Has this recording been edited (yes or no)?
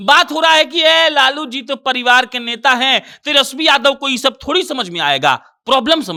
no